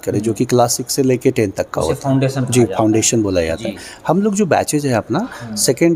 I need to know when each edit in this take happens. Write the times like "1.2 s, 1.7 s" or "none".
none

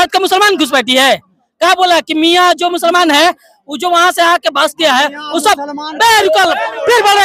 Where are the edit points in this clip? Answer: none

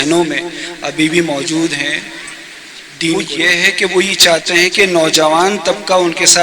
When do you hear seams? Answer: 3.2 s

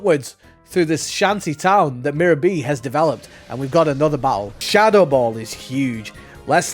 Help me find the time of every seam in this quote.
4.5 s

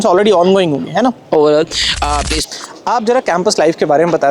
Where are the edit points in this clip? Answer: 2.3 s

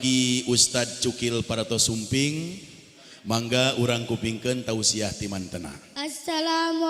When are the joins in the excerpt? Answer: 5.8 s

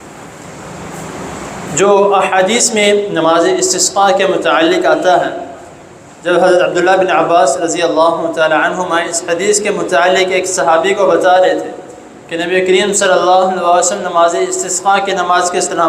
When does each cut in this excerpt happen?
none

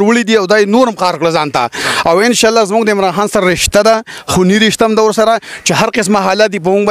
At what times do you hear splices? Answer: none

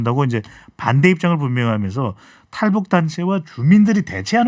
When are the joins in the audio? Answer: none

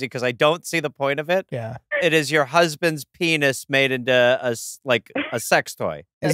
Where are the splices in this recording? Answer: 1.8 s

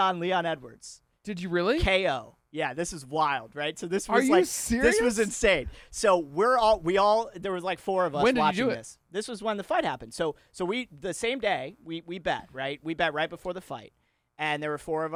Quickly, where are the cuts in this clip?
none

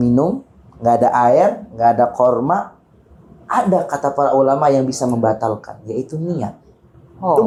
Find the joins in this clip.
none

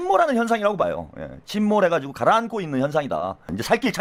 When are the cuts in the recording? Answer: none

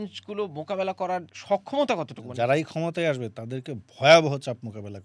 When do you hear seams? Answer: 1.3 s, 2.2 s

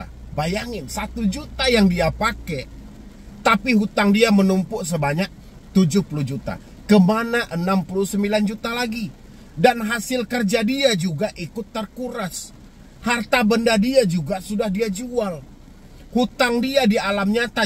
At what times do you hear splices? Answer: none

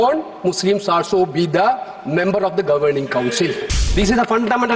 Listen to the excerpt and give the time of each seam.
3.8 s

